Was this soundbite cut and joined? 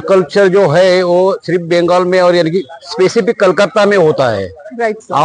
no; 0 cuts

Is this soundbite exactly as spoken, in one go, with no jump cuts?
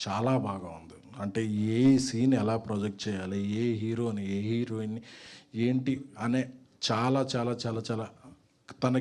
yes; 0 cuts

